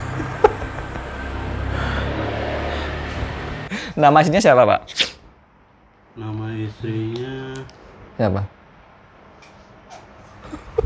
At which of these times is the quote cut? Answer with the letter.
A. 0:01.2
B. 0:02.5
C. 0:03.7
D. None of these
C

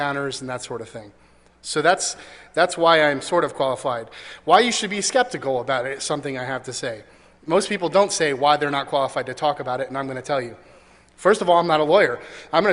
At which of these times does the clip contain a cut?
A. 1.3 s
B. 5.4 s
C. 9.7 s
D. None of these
C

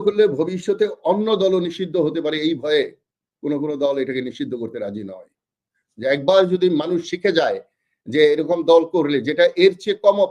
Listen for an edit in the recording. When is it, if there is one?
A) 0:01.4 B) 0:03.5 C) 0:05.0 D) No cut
D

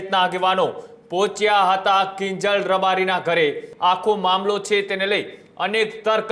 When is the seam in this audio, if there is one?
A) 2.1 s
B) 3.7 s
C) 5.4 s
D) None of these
B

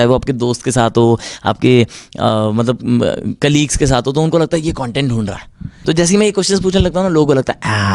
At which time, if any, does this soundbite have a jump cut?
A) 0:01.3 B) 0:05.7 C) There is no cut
B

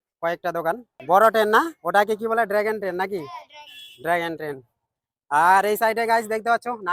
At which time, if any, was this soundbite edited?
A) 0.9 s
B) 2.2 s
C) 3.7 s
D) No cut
A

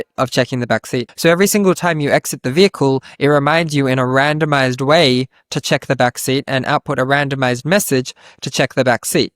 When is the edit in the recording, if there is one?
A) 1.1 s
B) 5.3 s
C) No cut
A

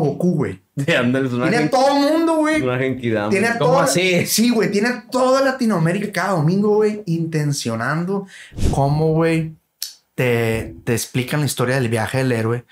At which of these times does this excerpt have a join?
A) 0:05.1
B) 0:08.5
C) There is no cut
B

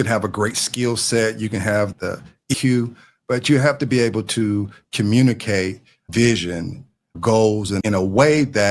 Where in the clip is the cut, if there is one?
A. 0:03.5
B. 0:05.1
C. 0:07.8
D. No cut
C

